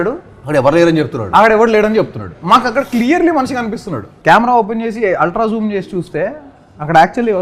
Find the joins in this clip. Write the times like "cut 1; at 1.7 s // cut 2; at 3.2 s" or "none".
cut 1; at 4.1 s